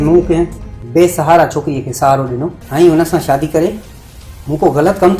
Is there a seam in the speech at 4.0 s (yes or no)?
no